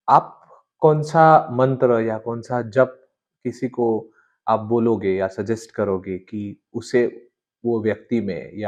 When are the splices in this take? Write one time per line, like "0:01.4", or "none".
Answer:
none